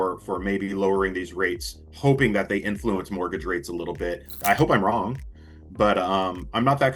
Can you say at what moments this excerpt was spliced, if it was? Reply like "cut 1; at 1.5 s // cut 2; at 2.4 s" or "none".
cut 1; at 4.4 s

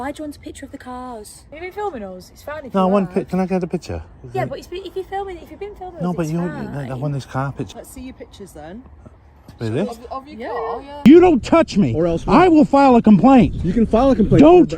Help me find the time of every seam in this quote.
cut 1; at 1.4 s // cut 2; at 7.7 s // cut 3; at 11.0 s

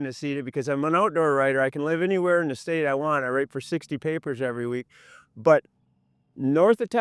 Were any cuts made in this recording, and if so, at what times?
none

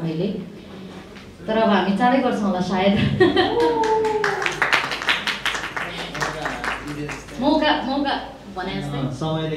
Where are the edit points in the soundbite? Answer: none

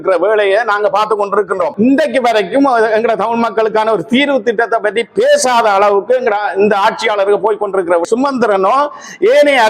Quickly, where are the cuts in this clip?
cut 1; at 1.7 s // cut 2; at 8.1 s

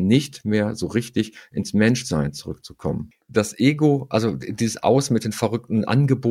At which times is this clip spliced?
cut 1; at 3.1 s

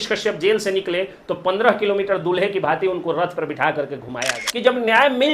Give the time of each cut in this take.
cut 1; at 4.4 s

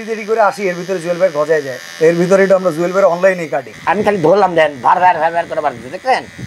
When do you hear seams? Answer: cut 1; at 1.8 s // cut 2; at 3.6 s

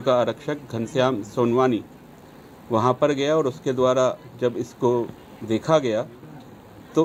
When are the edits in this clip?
none

